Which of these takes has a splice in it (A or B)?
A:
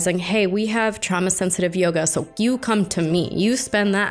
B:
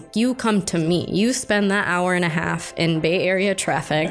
A